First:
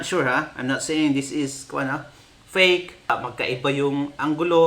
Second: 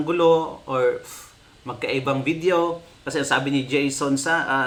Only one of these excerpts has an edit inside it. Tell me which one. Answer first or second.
first